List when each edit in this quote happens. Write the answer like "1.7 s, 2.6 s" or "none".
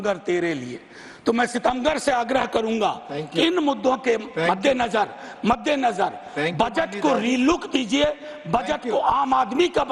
none